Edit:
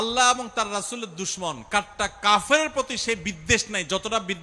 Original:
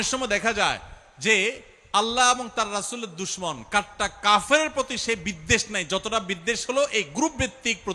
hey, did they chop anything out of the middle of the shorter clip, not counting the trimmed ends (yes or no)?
no